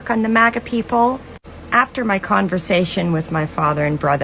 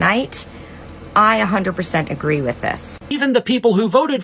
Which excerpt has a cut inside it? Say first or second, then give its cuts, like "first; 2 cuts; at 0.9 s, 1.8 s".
second; 1 cut; at 3.1 s